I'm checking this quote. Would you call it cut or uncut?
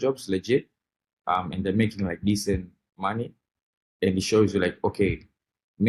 uncut